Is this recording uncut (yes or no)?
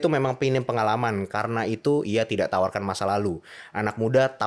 yes